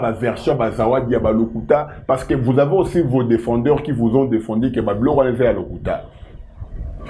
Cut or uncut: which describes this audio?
uncut